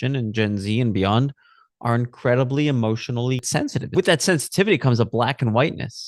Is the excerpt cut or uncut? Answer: cut